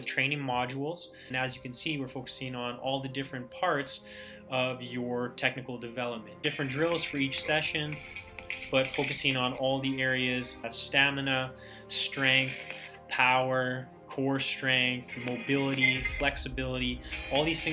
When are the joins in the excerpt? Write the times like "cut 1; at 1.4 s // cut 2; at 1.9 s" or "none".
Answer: cut 1; at 1.3 s // cut 2; at 6.4 s // cut 3; at 10.8 s